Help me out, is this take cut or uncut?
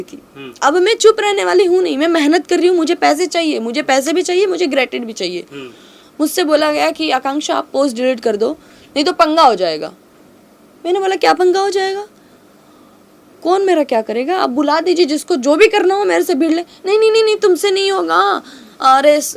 uncut